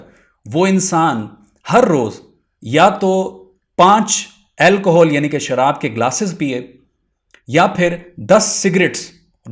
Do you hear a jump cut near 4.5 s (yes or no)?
no